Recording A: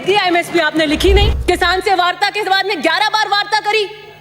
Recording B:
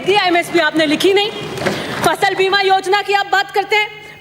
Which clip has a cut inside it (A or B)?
A